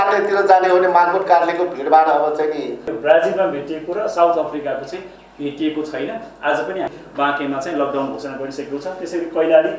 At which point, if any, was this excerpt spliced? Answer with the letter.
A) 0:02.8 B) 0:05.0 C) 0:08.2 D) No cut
A